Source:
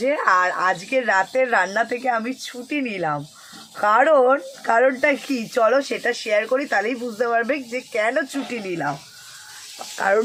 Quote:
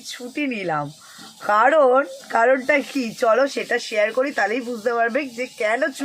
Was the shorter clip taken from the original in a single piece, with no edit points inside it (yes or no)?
yes